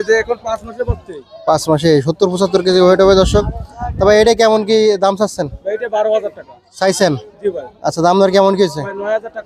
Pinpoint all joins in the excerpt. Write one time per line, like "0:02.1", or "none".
none